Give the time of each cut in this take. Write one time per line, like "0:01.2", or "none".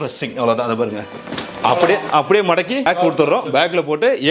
0:02.9

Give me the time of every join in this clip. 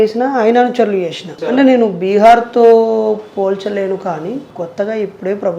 0:01.3
0:04.5

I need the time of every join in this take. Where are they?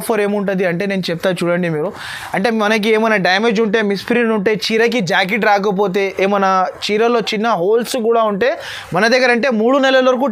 none

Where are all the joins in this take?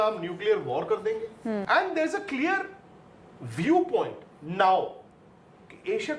0:01.6

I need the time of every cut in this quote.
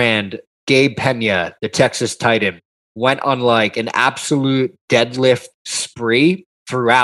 none

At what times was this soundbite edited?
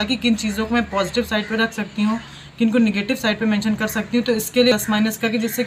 none

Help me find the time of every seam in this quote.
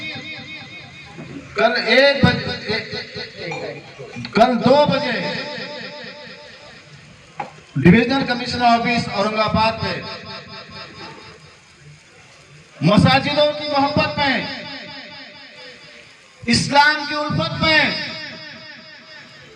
none

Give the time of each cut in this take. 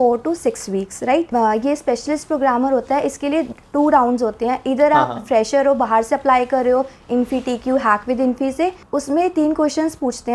0:01.3
0:08.8

